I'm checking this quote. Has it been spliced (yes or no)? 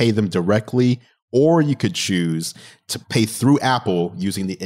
yes